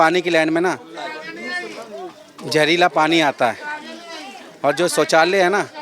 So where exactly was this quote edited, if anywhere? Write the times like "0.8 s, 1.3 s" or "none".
none